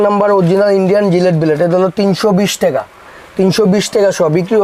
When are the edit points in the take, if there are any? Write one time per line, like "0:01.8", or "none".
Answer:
none